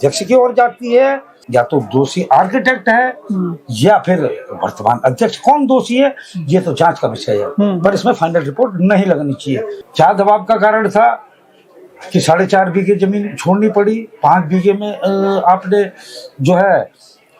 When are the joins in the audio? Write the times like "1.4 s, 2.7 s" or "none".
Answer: 1.4 s, 9.8 s